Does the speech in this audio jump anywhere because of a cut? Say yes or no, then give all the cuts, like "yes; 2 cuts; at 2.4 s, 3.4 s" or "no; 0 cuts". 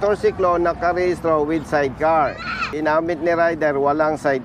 yes; 1 cut; at 2.7 s